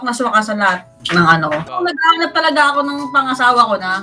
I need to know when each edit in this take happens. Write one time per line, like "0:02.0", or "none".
0:01.7